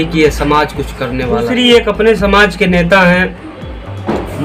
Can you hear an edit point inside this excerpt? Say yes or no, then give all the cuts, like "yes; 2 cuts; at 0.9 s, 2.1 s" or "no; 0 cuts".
yes; 1 cut; at 1.5 s